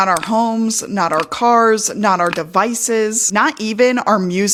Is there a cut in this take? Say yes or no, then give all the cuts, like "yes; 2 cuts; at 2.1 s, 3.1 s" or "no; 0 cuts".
no; 0 cuts